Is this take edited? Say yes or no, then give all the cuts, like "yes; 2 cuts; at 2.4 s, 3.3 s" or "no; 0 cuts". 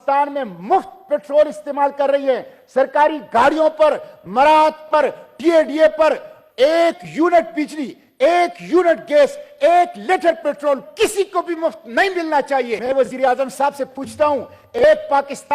yes; 1 cut; at 12.8 s